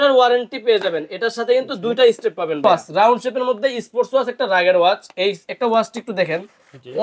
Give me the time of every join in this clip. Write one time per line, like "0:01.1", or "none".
0:02.6